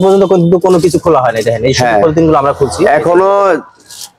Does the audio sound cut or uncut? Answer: uncut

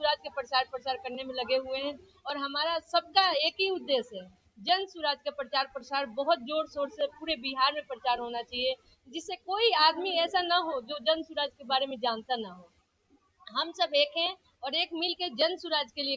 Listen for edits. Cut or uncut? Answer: uncut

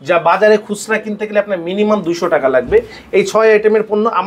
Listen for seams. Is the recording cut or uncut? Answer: uncut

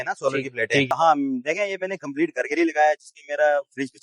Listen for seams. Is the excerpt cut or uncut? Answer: cut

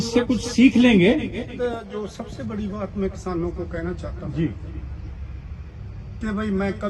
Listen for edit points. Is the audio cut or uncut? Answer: cut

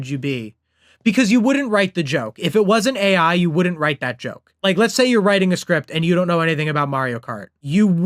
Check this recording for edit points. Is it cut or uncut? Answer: uncut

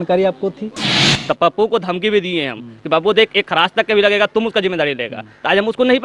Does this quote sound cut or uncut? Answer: cut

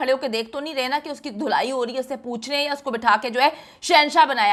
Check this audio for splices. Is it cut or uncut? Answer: uncut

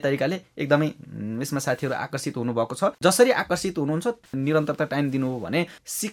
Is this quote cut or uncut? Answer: cut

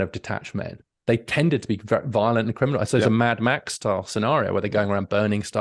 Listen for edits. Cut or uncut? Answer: uncut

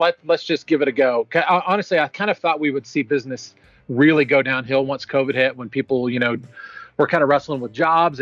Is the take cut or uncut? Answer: cut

